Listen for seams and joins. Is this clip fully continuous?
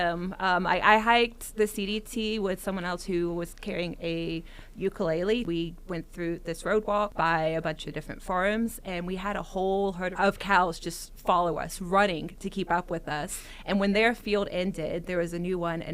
no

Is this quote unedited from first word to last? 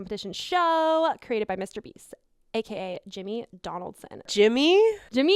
no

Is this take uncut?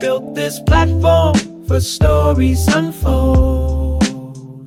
yes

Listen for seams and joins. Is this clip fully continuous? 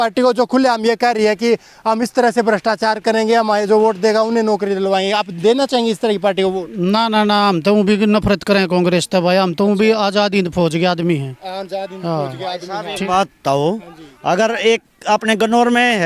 yes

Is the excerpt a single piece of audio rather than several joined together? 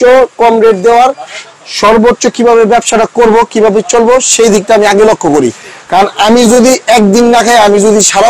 yes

